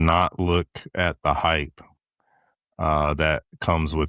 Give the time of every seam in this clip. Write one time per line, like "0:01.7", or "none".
none